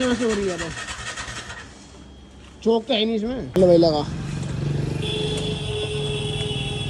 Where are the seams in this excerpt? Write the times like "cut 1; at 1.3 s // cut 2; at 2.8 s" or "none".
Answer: cut 1; at 3.6 s